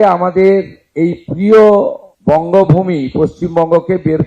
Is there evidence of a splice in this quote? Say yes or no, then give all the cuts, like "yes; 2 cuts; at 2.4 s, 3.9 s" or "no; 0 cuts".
yes; 1 cut; at 2.1 s